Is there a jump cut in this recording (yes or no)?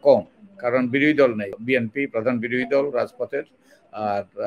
yes